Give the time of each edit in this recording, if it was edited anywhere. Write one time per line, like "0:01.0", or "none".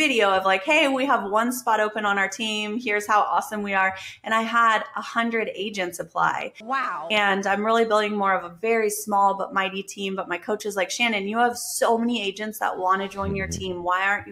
none